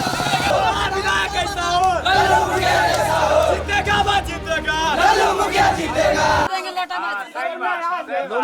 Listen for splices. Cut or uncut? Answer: cut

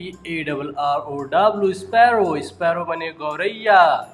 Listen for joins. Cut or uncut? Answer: uncut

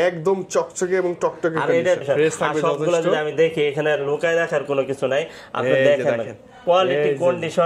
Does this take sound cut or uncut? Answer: cut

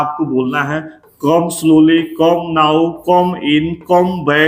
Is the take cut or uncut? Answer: uncut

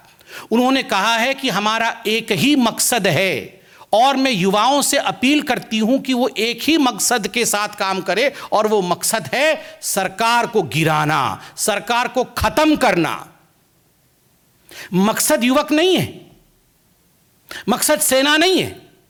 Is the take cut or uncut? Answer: uncut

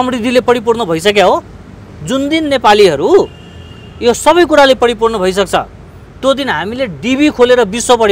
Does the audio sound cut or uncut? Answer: uncut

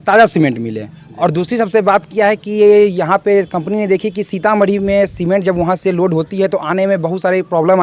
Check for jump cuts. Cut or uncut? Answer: uncut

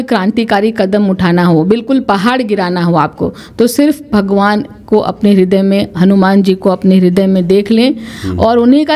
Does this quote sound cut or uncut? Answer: uncut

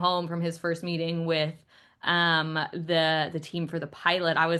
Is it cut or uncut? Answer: uncut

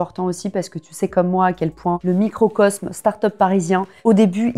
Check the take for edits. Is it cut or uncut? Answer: cut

